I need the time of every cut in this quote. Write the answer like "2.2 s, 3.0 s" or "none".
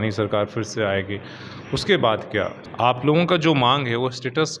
2.6 s